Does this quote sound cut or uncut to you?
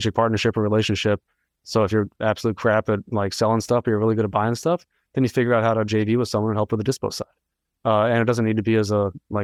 uncut